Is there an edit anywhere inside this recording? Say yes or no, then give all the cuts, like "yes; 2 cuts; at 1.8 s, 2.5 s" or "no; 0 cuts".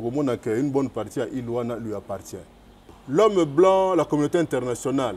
yes; 1 cut; at 2.9 s